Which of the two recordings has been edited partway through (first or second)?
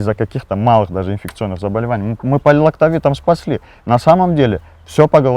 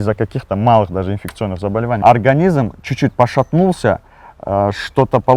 second